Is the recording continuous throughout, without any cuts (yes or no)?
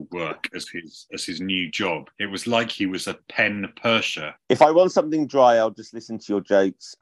no